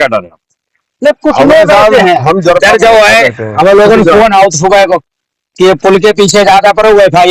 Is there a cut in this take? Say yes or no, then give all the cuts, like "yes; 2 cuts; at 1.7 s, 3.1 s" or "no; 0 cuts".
no; 0 cuts